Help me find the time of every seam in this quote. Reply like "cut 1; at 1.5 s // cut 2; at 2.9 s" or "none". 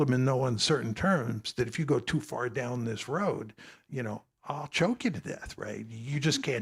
none